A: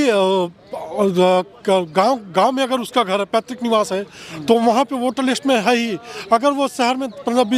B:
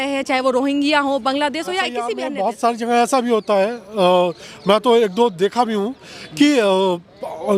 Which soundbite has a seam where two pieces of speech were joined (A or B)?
B